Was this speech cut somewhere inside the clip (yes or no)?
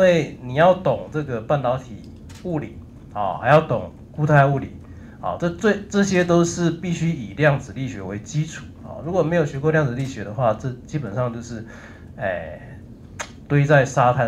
no